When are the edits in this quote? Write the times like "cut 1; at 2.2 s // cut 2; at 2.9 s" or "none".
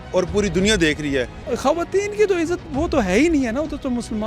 cut 1; at 1.4 s